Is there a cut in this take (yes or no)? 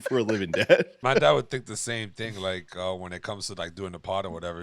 yes